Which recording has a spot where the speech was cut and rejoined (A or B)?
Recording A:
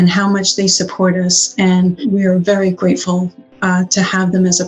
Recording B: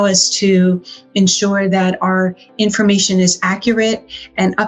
A